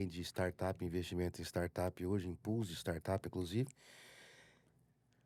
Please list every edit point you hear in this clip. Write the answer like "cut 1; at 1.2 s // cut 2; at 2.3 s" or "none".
none